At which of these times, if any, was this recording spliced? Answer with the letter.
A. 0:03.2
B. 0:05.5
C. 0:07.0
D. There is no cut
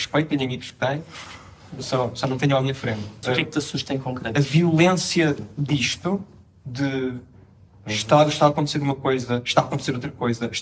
A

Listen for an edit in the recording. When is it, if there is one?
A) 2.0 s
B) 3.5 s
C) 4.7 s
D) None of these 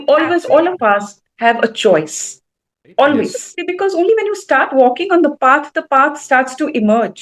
B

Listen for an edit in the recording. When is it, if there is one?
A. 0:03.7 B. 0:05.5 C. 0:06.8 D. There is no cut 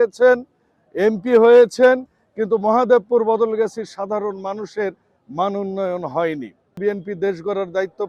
C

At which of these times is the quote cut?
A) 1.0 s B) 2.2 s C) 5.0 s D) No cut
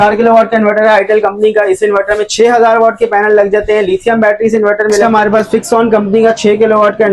C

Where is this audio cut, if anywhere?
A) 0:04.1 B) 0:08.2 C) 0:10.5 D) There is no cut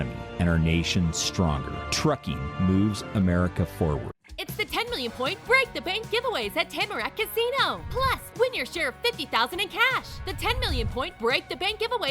A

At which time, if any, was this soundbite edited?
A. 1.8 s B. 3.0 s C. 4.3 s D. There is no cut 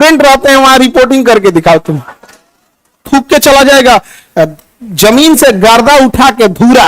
B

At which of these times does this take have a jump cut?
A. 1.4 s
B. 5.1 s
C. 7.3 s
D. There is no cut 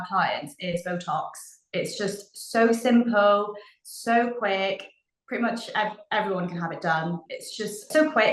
C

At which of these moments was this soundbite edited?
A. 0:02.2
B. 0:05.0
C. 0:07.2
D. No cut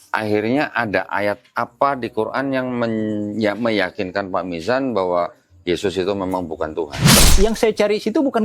C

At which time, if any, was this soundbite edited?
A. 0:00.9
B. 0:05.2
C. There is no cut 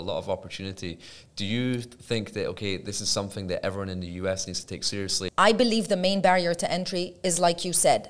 B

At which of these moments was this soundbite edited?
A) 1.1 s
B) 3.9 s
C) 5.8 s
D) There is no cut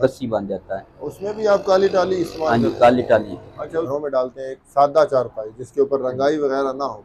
B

